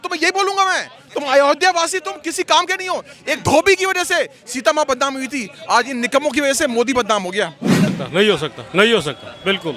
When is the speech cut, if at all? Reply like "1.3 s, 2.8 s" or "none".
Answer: 7.9 s

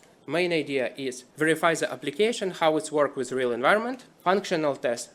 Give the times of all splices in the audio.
1.2 s, 4.1 s

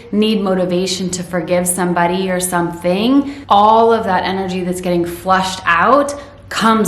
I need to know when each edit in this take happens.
3.4 s

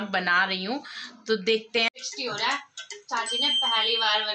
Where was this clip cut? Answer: 1.9 s

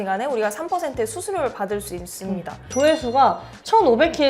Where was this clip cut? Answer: 2.7 s

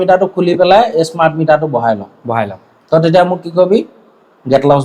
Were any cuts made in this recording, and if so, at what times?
none

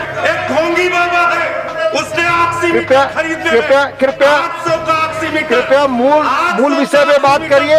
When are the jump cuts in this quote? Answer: none

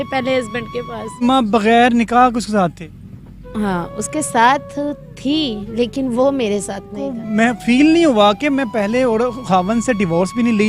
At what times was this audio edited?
1.2 s, 7.2 s

